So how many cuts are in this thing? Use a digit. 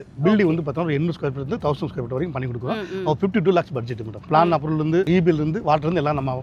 2